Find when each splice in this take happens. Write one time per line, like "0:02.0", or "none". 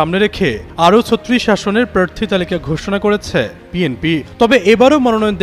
0:04.3